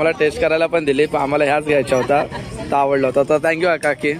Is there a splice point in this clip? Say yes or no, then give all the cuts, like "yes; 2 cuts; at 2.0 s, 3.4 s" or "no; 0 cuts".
no; 0 cuts